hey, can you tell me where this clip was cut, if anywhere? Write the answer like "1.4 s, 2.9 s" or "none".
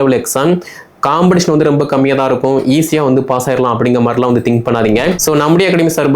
5.2 s